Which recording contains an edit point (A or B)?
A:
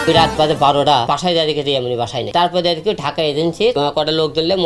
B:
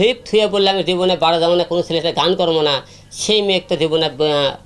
A